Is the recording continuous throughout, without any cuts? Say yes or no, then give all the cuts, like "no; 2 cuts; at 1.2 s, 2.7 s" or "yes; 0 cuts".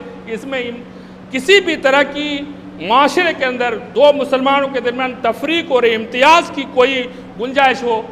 yes; 0 cuts